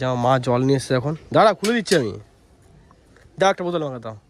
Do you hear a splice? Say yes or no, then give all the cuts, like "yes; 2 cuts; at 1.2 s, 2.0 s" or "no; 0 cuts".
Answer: no; 0 cuts